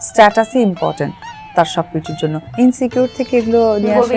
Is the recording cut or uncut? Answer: cut